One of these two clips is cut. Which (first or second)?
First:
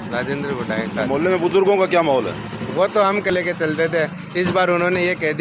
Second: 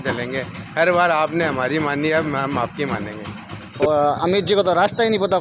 second